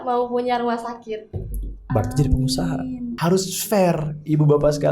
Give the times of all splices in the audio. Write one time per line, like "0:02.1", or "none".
0:03.1